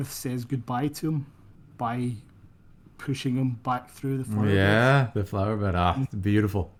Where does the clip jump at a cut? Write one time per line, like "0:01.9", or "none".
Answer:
none